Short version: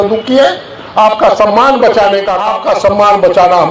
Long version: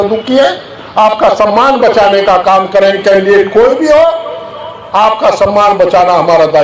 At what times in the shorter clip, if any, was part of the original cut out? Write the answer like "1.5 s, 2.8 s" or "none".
2.4 s